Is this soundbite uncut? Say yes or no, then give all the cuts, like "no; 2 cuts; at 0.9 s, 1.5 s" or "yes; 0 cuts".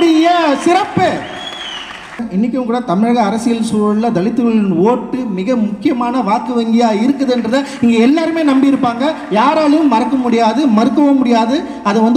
no; 1 cut; at 2.2 s